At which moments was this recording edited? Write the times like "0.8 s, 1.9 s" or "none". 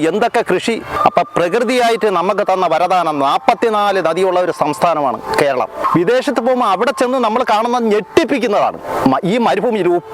0.9 s, 5.8 s